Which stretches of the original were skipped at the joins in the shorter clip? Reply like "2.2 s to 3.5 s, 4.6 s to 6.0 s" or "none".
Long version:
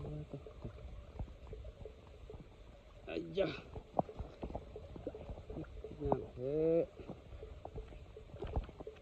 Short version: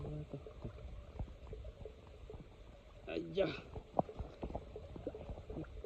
none